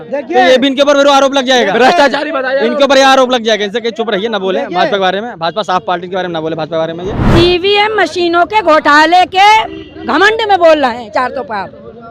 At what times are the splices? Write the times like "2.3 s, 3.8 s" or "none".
7.1 s